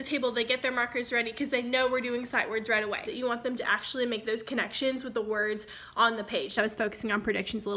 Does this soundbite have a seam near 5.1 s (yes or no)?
no